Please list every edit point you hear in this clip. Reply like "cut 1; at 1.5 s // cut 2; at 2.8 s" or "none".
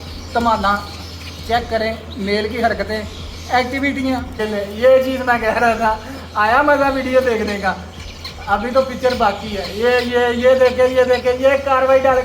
cut 1; at 4.4 s